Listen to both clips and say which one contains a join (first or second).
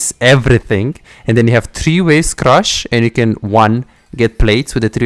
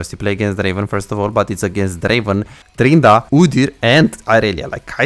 second